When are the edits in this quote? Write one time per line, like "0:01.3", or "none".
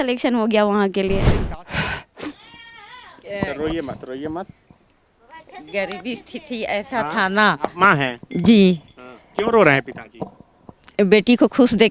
0:01.3